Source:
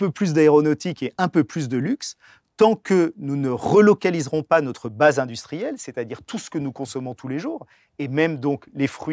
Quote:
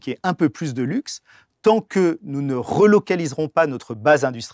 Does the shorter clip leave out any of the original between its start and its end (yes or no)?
no